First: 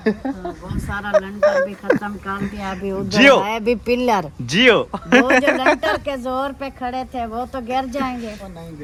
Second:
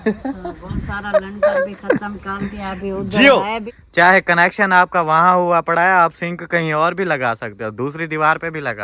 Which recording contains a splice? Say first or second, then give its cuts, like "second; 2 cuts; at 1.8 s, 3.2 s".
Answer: second; 1 cut; at 3.6 s